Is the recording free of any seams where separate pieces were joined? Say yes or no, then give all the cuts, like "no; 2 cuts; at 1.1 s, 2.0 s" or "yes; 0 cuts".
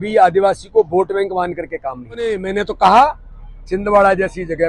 no; 1 cut; at 2.4 s